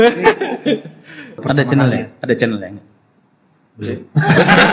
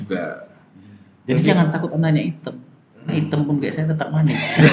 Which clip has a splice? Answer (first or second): first